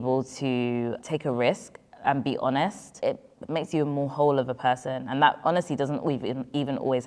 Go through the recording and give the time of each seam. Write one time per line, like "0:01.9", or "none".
0:01.0
0:02.9